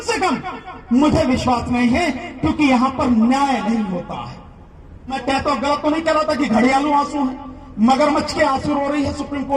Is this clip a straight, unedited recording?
no; 1 cut; at 5.2 s

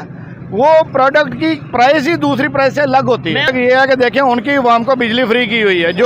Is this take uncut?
no; 1 cut; at 3.5 s

